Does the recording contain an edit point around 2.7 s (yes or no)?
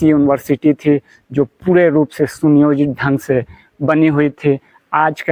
no